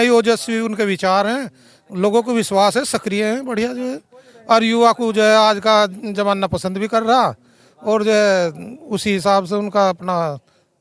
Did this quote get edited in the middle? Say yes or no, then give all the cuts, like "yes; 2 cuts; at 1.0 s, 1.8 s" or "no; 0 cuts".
no; 0 cuts